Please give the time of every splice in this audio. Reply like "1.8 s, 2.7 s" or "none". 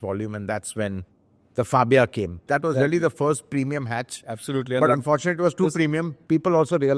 2.4 s, 6.1 s